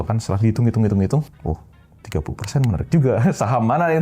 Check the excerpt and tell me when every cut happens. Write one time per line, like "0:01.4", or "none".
0:01.3